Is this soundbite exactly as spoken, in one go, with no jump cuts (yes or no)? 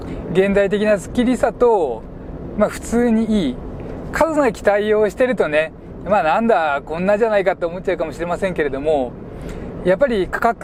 yes